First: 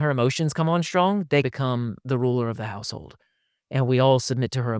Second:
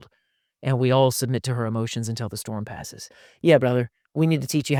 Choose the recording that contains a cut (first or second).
first